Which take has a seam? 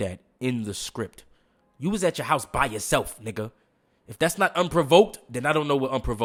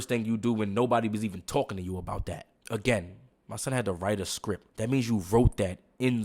second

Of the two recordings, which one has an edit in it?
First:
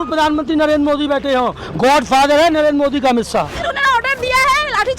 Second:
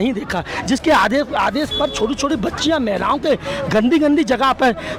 first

